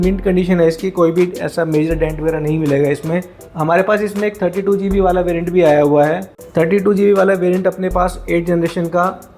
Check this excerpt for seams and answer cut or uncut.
uncut